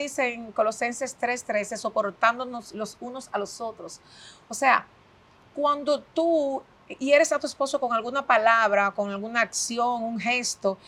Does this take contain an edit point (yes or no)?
no